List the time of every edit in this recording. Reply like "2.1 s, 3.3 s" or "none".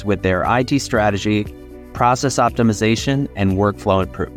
none